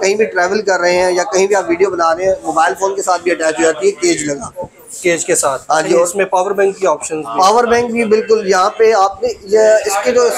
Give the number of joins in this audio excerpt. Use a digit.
0